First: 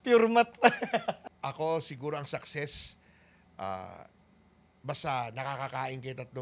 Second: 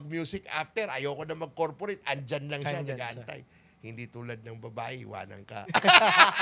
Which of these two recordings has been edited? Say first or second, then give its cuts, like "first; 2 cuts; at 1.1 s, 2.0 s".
first; 1 cut; at 1.3 s